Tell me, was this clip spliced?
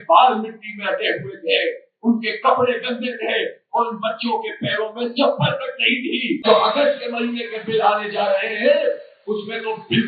yes; 1 cut; at 6.4 s

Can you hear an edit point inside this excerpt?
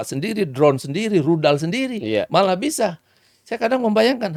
no; 0 cuts

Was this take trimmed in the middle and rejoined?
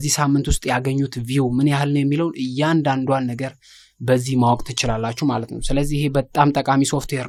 no; 0 cuts

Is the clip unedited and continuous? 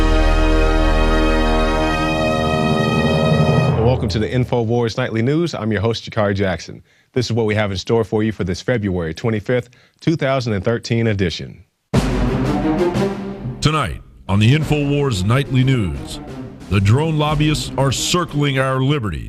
yes; 0 cuts

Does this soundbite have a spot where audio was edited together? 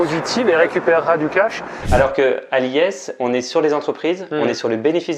yes; 1 cut; at 1.8 s

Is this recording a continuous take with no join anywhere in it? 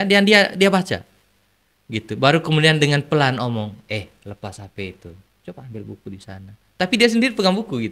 yes; 0 cuts

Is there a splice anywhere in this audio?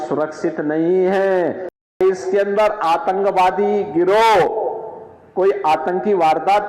yes; 1 cut; at 1.9 s

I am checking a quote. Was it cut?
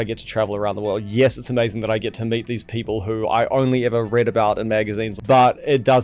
yes; 1 cut; at 5.1 s

